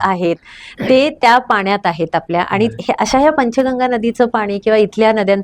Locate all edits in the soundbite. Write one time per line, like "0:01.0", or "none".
none